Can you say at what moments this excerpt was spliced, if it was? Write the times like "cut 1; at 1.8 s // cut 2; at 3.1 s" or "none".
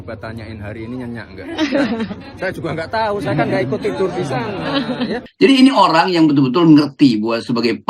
cut 1; at 5.2 s